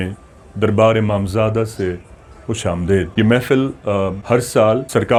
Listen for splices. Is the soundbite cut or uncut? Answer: uncut